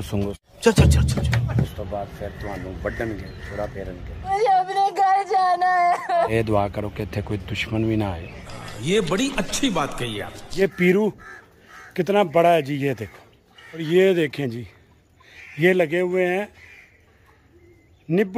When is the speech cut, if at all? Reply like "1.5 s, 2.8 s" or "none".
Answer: 1.6 s, 6.3 s, 10.6 s, 13.8 s